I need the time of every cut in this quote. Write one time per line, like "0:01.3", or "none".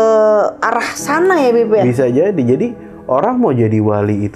none